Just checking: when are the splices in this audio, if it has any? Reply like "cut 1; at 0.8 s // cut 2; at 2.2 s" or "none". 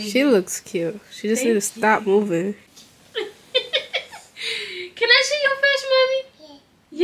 cut 1; at 2.7 s